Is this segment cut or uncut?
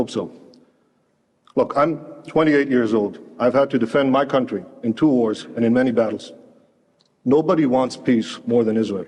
uncut